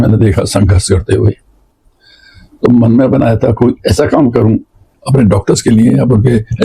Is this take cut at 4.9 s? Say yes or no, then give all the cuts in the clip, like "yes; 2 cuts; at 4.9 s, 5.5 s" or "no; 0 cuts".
yes; 1 cut; at 4.9 s